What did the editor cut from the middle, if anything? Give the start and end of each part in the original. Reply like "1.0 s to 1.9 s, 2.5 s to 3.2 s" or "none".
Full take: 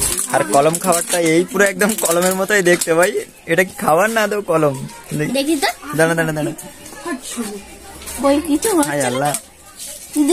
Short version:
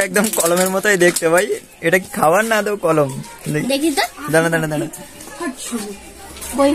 none